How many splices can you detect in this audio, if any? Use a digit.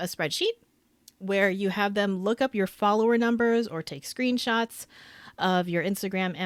0